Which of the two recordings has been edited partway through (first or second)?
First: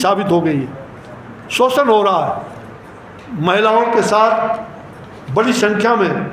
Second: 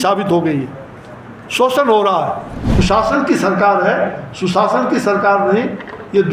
second